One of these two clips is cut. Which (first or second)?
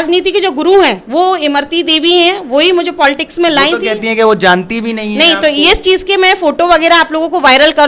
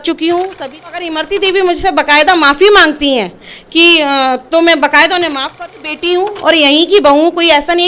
second